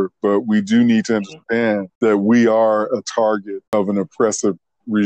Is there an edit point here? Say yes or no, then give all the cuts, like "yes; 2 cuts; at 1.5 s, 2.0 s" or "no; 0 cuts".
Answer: yes; 2 cuts; at 1.9 s, 3.7 s